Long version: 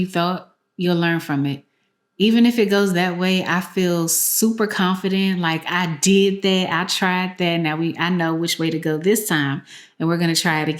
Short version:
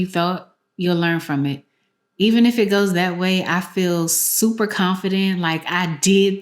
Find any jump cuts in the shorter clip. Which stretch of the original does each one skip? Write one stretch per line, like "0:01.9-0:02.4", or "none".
none